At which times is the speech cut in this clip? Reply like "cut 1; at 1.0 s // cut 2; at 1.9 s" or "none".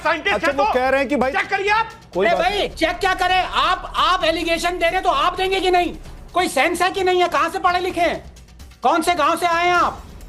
none

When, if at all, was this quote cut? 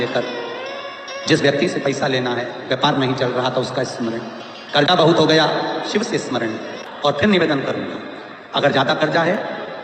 cut 1; at 6.8 s

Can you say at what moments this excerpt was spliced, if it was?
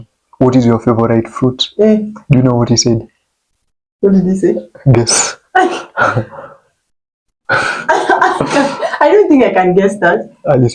none

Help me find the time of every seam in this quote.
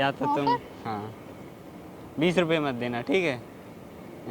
none

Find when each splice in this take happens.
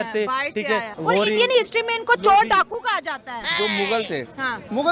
cut 1; at 0.9 s // cut 2; at 3.5 s

